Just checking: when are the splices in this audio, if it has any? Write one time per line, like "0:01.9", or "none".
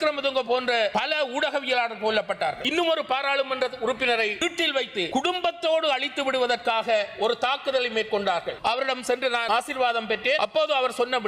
0:00.9
0:02.6
0:05.1
0:08.5
0:09.4
0:10.4